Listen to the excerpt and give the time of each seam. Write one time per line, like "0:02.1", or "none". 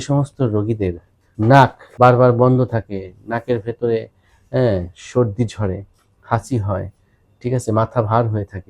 0:01.4